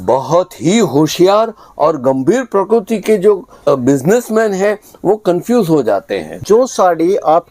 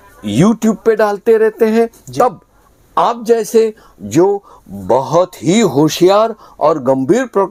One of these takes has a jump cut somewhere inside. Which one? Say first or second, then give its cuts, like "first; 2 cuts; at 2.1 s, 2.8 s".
first; 2 cuts; at 3.7 s, 6.4 s